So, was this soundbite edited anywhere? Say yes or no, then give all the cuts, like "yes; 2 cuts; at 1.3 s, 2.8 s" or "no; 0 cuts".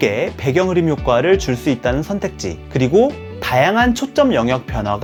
no; 0 cuts